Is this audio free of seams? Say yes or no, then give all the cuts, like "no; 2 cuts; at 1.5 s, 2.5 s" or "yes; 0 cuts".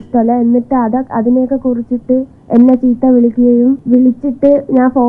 no; 2 cuts; at 2.4 s, 3.8 s